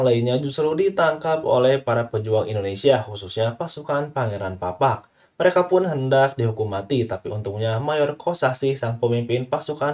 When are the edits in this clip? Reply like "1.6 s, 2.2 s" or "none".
none